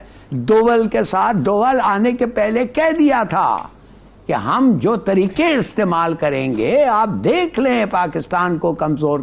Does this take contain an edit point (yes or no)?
no